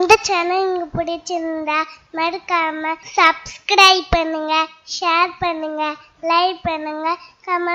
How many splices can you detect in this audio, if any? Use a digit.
1